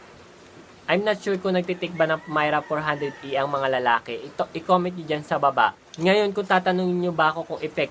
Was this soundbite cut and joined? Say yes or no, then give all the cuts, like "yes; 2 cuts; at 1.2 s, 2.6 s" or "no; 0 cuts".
yes; 1 cut; at 5.8 s